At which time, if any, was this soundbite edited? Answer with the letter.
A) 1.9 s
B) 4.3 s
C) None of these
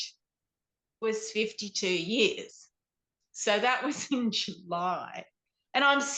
C